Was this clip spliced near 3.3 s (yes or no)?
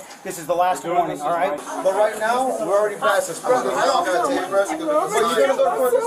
no